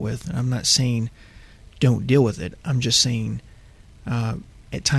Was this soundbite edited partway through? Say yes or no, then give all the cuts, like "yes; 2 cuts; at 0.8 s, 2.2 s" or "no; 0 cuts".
no; 0 cuts